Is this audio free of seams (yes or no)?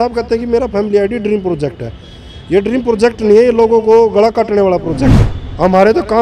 no